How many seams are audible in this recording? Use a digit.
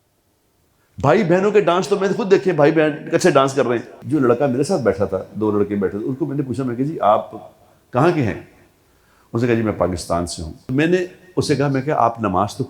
2